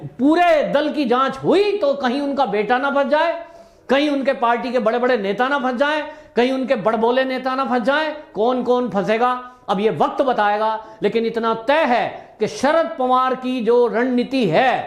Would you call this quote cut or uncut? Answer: uncut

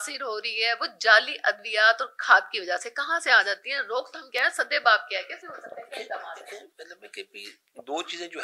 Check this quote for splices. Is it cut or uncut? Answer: uncut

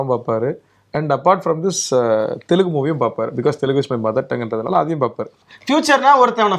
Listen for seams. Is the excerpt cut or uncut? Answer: cut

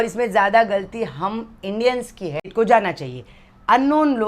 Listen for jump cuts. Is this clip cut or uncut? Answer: cut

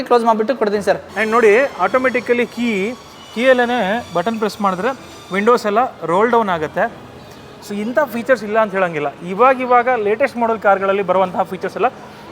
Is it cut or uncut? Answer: cut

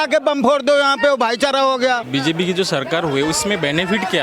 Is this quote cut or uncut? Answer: cut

